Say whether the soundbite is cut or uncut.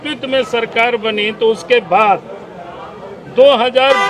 uncut